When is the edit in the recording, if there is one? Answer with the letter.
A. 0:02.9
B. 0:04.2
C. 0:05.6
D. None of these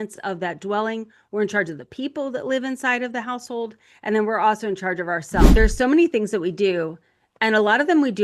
C